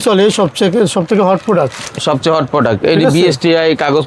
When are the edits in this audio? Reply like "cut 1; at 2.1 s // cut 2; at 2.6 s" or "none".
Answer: none